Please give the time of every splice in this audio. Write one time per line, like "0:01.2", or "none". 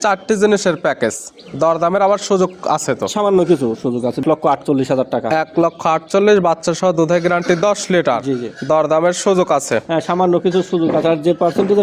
0:04.2